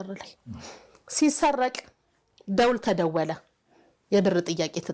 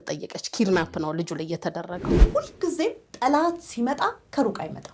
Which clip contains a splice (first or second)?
second